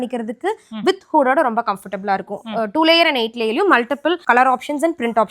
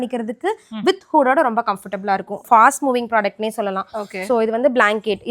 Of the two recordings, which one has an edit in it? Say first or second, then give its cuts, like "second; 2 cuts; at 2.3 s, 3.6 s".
second; 1 cut; at 2.4 s